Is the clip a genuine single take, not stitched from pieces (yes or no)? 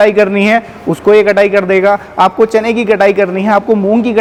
yes